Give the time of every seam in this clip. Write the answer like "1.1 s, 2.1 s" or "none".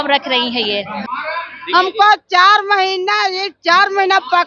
1.0 s